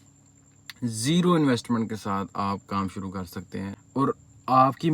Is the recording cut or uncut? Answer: cut